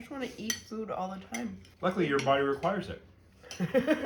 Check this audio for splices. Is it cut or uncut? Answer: cut